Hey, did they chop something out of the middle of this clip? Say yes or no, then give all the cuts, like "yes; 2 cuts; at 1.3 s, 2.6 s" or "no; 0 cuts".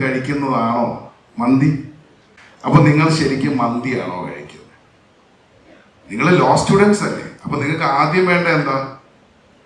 no; 0 cuts